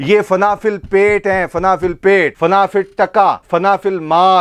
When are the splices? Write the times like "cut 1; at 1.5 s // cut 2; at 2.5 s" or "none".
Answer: cut 1; at 2.3 s // cut 2; at 3.4 s